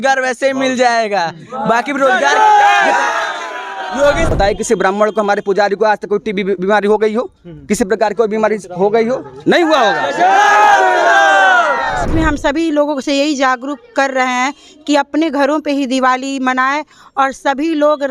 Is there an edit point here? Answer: yes; 2 cuts; at 4.3 s, 12.1 s

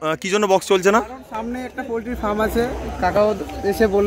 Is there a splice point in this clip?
no; 0 cuts

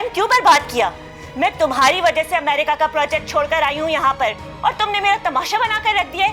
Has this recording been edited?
no; 0 cuts

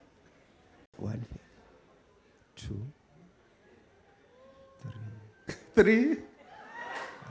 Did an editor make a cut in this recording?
yes; 1 cut; at 1.0 s

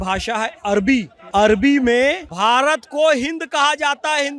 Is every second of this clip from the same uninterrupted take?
no; 2 cuts; at 1.2 s, 2.3 s

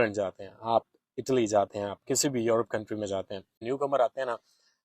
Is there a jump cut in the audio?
yes; 1 cut; at 3.7 s

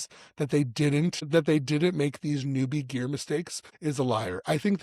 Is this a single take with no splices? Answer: no; 2 cuts; at 1.3 s, 3.6 s

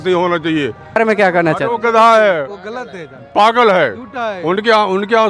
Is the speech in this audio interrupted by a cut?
yes; 1 cut; at 1.0 s

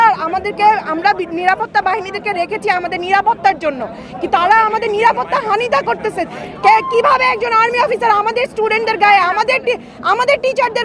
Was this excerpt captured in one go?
yes; 0 cuts

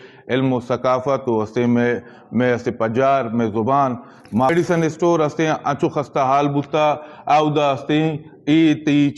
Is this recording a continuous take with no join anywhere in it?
no; 1 cut; at 4.5 s

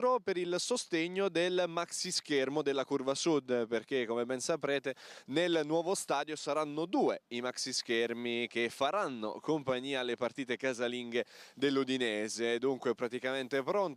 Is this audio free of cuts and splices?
yes; 0 cuts

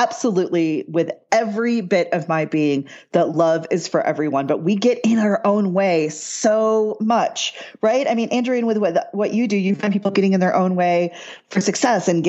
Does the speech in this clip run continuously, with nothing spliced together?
yes; 0 cuts

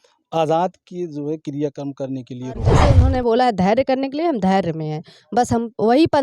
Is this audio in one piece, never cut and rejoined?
no; 1 cut; at 2.9 s

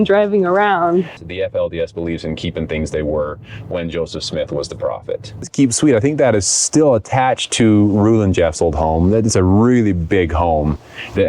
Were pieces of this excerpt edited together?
yes; 2 cuts; at 1.2 s, 5.5 s

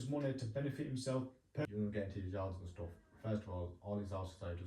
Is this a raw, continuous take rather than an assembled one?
no; 1 cut; at 1.6 s

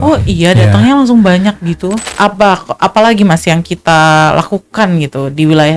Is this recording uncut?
no; 1 cut; at 2.0 s

